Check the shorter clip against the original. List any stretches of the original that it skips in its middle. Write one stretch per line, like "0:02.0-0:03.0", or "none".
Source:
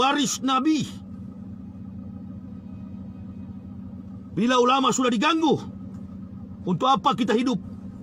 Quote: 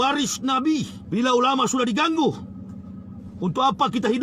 0:01.0-0:04.2